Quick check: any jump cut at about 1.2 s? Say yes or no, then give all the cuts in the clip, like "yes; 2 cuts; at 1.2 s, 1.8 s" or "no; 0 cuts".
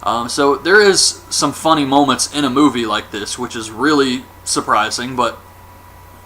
no; 0 cuts